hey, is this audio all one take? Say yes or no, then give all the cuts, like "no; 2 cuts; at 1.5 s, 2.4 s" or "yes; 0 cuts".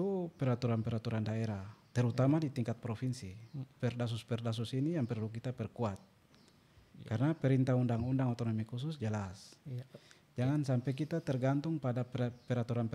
yes; 0 cuts